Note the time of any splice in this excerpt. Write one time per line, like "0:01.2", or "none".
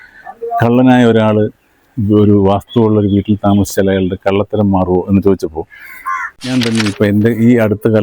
0:06.4